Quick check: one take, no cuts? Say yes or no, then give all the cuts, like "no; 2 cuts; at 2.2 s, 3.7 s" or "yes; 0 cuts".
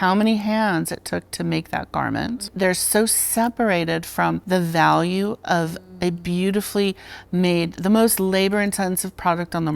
no; 2 cuts; at 2.5 s, 4.4 s